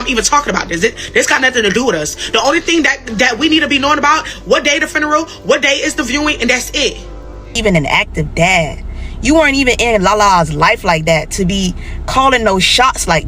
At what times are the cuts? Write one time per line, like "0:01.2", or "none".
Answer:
0:07.6